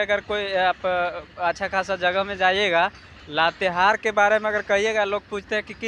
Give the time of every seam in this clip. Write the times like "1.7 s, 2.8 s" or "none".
none